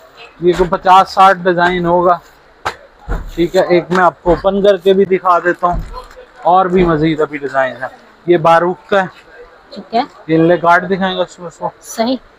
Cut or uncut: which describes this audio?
uncut